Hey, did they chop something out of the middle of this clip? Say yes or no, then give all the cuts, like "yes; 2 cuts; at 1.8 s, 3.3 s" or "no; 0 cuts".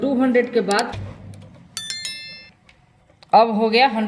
yes; 1 cut; at 1.0 s